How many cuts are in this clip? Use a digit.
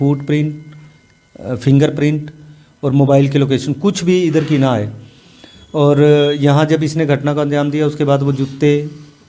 0